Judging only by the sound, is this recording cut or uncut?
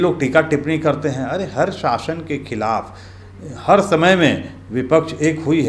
uncut